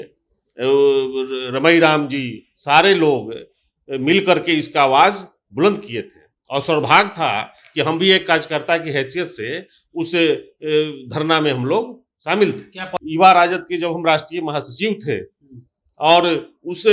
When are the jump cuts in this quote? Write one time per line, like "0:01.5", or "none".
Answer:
0:12.9

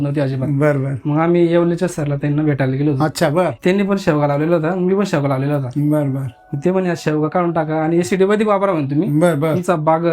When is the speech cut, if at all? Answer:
0:03.6

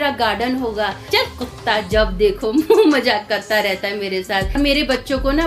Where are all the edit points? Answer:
0:01.1
0:04.6

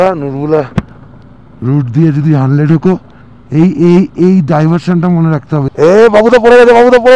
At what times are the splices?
0:05.7

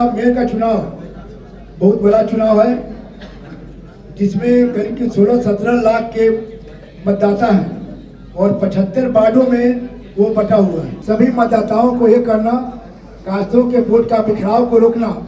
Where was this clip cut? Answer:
0:10.9

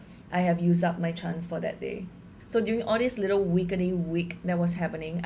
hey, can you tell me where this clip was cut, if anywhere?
0:02.3

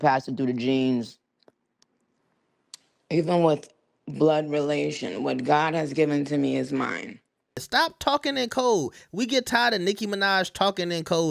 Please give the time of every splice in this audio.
0:07.6

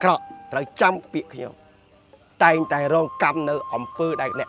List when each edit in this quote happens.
none

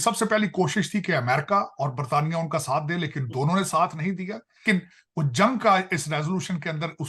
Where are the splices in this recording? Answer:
0:04.6

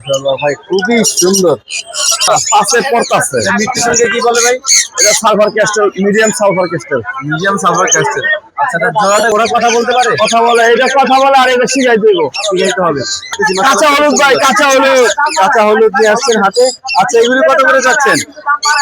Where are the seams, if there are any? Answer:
0:02.2
0:09.3
0:13.3

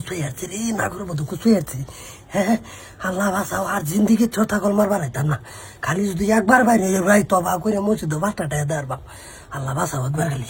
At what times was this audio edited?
none

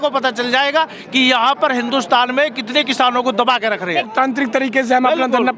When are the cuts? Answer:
0:04.1

